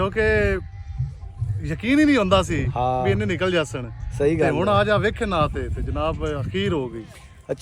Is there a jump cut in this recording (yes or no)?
no